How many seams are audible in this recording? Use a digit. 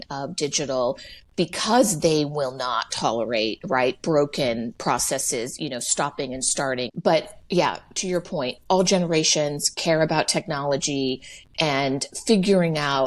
1